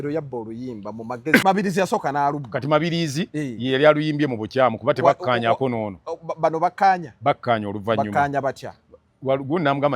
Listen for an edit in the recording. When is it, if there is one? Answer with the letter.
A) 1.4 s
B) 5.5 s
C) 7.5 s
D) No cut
A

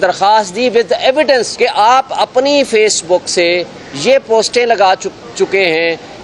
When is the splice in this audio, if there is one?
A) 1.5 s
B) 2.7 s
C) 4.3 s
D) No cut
A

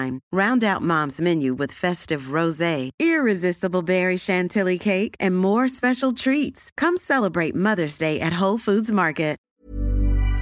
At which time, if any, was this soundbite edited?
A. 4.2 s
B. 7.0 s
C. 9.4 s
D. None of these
C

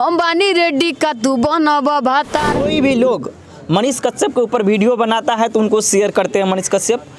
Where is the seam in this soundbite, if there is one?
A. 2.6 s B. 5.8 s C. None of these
A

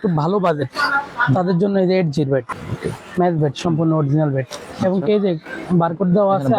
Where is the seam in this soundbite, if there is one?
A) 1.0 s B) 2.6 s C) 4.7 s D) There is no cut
B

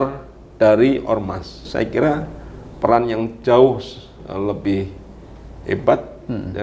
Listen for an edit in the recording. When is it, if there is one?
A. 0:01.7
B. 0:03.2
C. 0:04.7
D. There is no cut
A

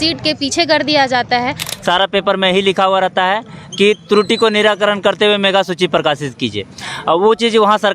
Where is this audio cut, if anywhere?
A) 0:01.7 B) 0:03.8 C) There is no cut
A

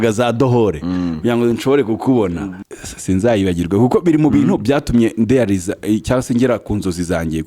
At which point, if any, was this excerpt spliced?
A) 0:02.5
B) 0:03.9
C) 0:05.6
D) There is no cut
A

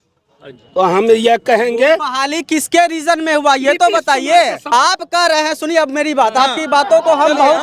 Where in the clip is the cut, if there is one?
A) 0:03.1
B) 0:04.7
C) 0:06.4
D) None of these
B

